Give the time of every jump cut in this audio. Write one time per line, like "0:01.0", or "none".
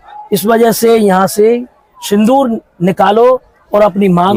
none